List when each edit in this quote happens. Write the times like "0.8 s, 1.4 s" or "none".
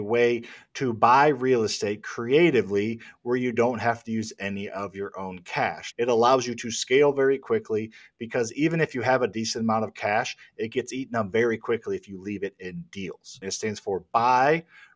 5.8 s, 13.4 s